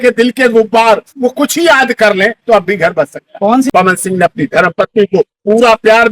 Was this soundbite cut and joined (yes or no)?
yes